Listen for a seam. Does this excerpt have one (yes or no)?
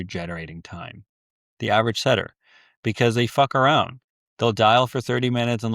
no